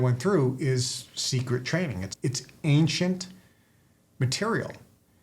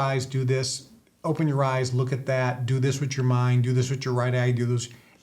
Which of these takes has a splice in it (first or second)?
first